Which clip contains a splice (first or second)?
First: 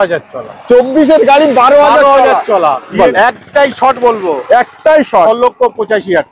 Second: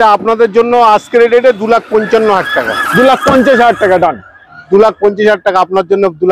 first